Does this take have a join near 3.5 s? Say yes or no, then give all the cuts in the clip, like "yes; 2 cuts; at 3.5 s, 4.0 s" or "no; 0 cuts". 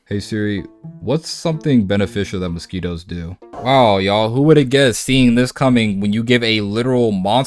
yes; 1 cut; at 3.5 s